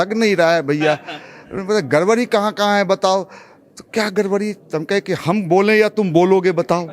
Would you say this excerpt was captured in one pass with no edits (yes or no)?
yes